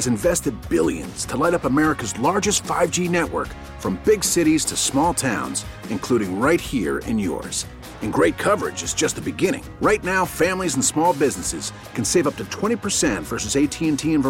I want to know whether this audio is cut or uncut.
uncut